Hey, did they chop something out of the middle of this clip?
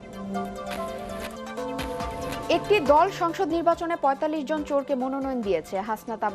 yes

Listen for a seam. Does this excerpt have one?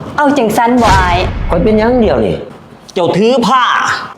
yes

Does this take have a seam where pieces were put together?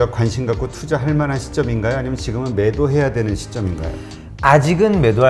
no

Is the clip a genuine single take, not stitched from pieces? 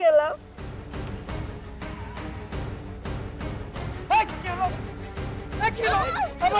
yes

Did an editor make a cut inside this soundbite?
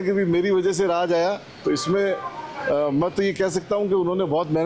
no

